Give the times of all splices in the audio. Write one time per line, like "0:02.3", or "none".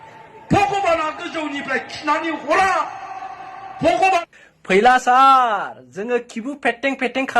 0:04.3